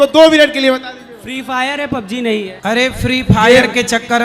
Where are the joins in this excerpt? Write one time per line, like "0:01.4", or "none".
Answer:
0:02.5